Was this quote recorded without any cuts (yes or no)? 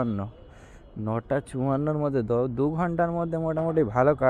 yes